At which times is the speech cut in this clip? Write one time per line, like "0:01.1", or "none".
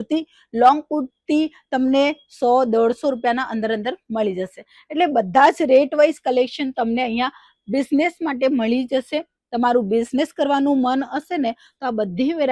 none